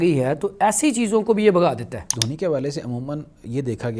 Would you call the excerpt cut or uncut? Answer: cut